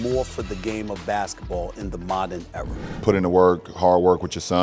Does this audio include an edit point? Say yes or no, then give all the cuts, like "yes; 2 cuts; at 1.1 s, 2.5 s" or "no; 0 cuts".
yes; 1 cut; at 2.9 s